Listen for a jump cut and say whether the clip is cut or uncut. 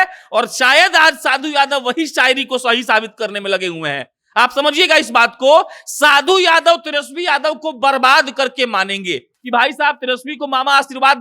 cut